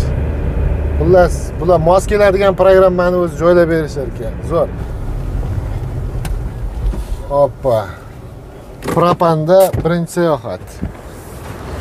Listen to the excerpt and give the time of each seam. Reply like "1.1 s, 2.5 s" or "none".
4.9 s